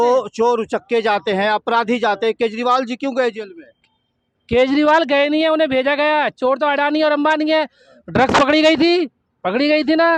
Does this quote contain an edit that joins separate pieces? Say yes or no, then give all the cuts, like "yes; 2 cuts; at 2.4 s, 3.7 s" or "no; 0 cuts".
no; 0 cuts